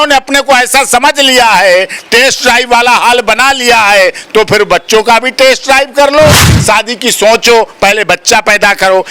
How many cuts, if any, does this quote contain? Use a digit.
1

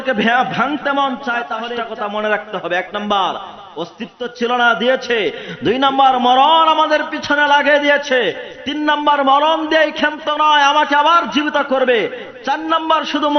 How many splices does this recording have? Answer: 1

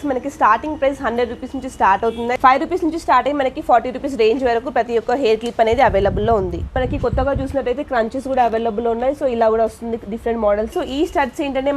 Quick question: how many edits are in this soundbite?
3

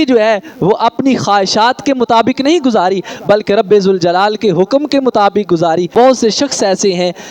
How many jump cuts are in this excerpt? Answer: 1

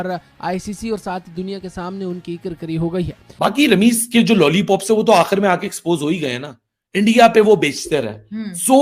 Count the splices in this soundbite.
1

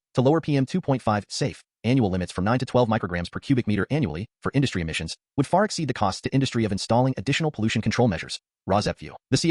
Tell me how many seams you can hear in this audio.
0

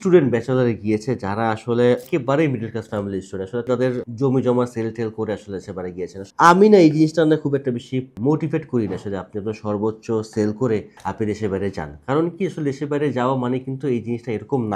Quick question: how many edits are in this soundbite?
3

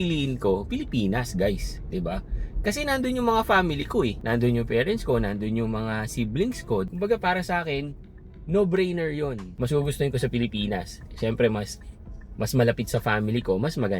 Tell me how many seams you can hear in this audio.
2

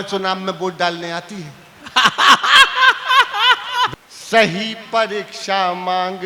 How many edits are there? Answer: 1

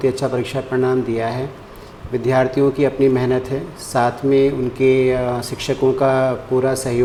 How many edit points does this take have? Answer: 0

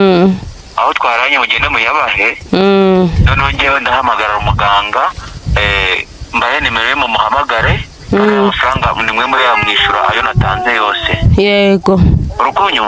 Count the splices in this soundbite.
0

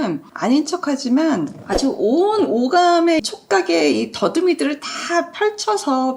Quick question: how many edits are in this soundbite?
1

